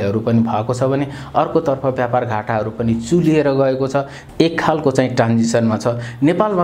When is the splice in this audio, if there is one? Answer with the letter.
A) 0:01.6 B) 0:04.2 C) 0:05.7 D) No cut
B